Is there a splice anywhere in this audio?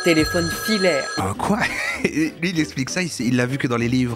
yes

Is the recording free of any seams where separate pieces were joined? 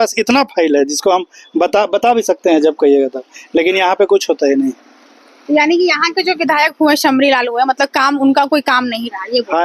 yes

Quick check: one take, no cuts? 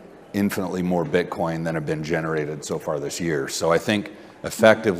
yes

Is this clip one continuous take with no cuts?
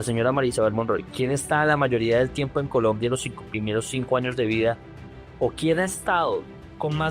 no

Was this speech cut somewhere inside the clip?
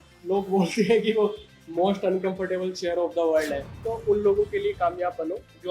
yes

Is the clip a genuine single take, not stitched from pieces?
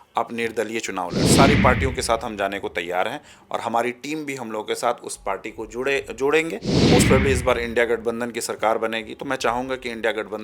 no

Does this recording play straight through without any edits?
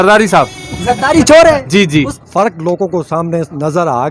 no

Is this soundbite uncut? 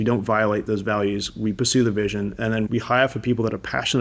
no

